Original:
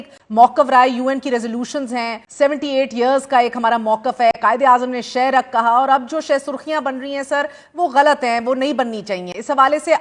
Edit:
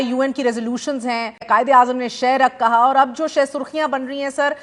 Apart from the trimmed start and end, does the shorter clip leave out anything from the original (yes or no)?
yes